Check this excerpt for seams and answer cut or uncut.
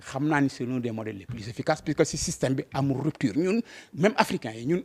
uncut